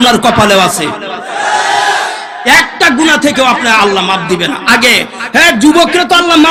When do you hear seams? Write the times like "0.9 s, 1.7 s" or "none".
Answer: none